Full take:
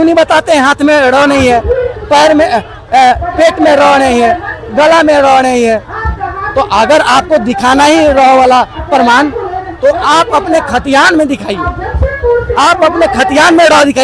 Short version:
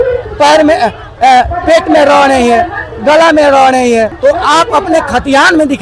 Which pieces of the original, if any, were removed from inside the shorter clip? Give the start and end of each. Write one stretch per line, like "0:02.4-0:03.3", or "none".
0:05.8-0:09.7